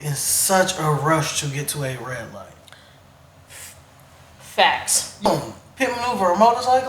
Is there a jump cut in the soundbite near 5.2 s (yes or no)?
yes